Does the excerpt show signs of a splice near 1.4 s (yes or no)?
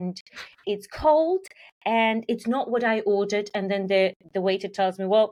no